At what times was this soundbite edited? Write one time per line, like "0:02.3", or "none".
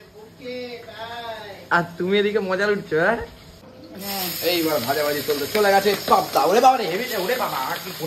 0:03.7